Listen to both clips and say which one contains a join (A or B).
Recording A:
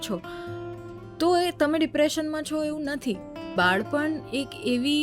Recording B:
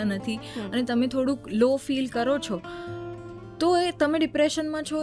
A